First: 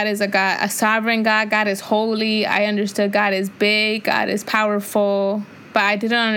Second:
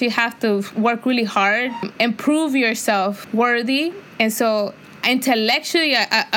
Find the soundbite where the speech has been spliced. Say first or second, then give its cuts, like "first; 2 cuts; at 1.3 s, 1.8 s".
second; 3 cuts; at 1.9 s, 3.2 s, 4.0 s